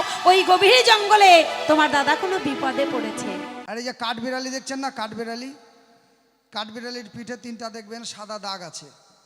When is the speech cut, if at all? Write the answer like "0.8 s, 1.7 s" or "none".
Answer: 3.6 s